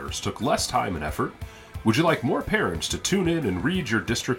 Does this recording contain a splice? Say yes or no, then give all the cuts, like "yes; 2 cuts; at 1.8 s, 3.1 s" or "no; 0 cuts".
no; 0 cuts